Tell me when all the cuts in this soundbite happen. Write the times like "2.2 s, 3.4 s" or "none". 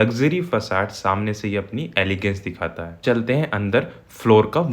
3.0 s